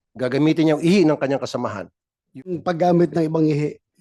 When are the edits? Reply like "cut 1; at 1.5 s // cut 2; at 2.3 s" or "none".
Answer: cut 1; at 2.5 s